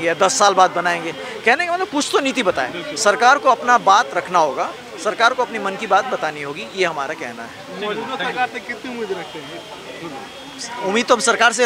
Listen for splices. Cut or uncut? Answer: uncut